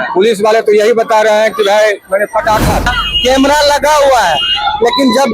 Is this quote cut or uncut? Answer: cut